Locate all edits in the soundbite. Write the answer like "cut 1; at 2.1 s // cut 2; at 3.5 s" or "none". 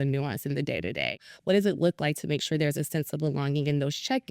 cut 1; at 1.1 s